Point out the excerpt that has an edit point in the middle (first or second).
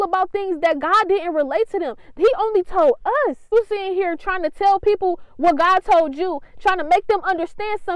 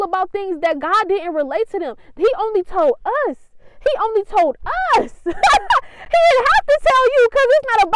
first